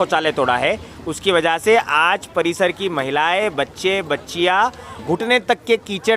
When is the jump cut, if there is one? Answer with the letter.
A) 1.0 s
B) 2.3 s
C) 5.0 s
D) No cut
C